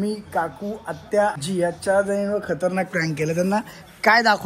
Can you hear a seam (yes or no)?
yes